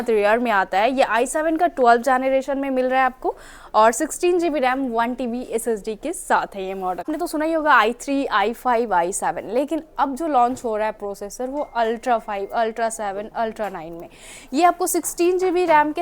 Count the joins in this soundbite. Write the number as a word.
one